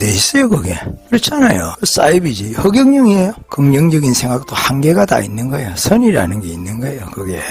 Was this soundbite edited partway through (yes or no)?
yes